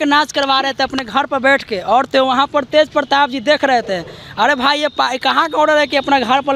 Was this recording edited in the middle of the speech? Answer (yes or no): no